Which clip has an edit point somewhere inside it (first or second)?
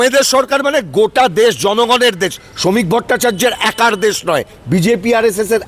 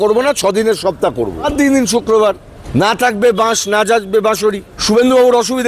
second